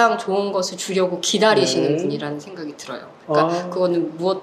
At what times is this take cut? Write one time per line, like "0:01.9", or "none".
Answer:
none